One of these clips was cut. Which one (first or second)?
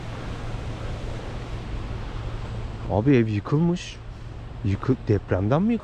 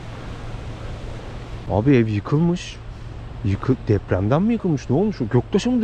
second